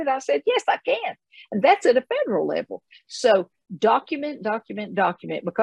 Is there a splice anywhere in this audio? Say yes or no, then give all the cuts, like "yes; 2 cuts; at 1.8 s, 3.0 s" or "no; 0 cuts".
no; 0 cuts